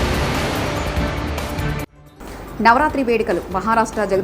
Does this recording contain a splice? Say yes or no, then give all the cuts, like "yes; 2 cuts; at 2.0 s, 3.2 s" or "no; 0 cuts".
yes; 1 cut; at 2.0 s